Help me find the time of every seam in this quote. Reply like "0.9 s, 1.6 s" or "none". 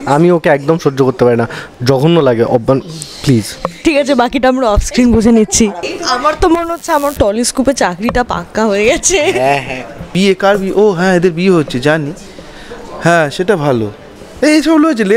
5.9 s, 10.1 s